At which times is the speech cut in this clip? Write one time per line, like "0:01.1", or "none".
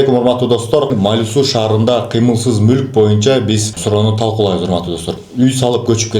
0:00.9
0:03.7
0:05.0